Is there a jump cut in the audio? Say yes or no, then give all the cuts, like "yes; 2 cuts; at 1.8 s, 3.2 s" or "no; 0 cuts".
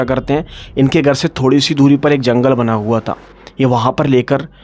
no; 0 cuts